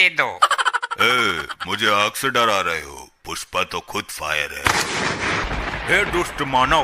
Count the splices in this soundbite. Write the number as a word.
one